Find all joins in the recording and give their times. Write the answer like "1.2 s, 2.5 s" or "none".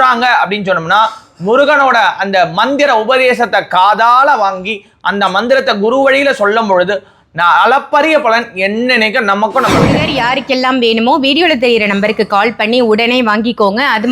10.0 s